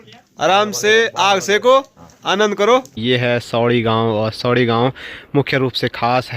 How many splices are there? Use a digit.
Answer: 1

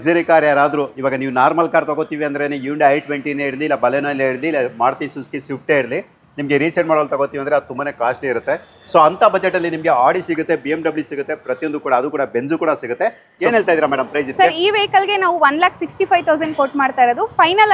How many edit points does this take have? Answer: 1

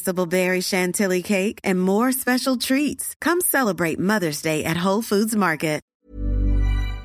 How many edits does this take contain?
1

